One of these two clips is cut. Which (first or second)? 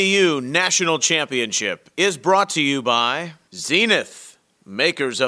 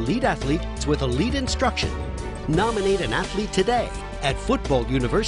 first